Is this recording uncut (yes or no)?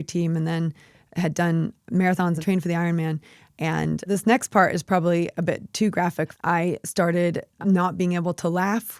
no